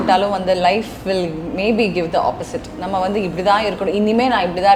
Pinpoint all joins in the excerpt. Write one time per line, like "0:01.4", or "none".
none